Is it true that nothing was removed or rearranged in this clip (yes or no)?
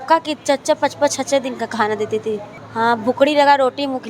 no